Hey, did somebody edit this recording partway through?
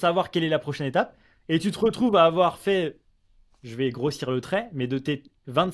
no; 0 cuts

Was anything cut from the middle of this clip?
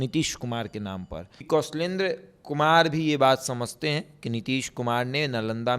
yes; 1 cut; at 1.5 s

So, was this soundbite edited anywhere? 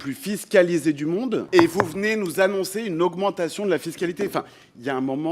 yes; 1 cut; at 1.5 s

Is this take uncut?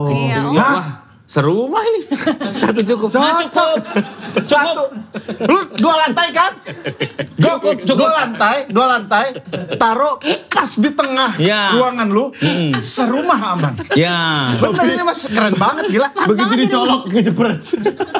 yes; 0 cuts

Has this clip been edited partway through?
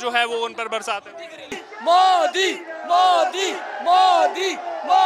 yes; 1 cut; at 1.6 s

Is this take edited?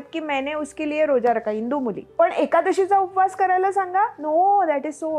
yes; 1 cut; at 2.0 s

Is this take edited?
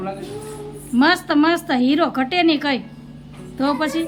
no; 0 cuts

